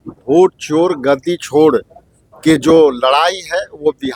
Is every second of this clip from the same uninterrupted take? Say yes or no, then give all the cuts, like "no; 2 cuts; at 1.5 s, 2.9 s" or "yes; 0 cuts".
yes; 0 cuts